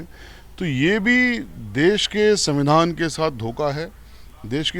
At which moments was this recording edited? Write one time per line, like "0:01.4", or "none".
none

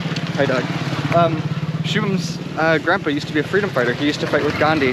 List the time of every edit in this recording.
none

